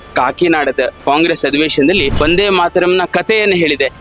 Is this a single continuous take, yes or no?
no